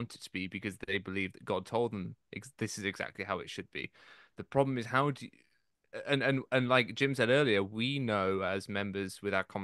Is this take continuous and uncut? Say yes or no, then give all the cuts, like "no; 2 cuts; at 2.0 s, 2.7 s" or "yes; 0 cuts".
yes; 0 cuts